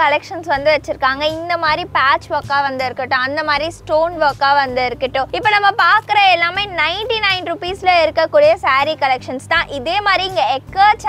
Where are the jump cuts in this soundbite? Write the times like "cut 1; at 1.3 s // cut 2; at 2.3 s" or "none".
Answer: cut 1; at 5.3 s